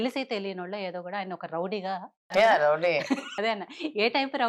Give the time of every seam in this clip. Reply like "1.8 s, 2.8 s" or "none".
2.2 s, 3.3 s